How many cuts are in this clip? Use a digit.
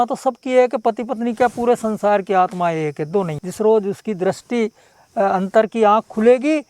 1